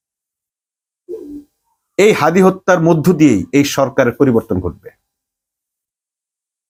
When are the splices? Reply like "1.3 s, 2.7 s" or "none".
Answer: none